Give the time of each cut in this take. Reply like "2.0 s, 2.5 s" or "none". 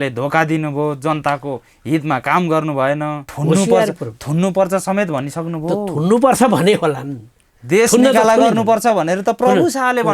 none